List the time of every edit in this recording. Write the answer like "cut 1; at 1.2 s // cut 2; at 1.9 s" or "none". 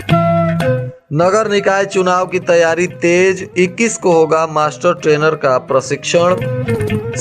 cut 1; at 0.9 s